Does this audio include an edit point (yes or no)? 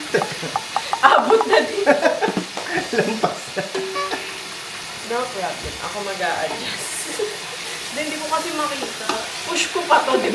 no